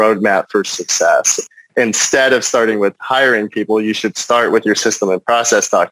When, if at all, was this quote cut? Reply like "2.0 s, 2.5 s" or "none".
1.4 s